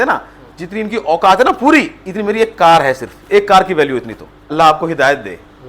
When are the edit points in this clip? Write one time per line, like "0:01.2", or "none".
0:04.5